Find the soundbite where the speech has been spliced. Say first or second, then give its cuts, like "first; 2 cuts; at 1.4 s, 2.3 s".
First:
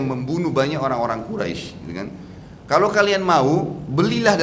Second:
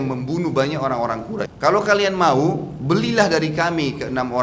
second; 1 cut; at 1.5 s